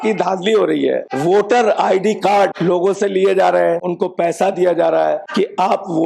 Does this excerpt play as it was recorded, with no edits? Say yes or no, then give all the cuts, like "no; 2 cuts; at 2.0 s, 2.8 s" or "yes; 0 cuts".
no; 4 cuts; at 1.1 s, 2.6 s, 3.9 s, 5.3 s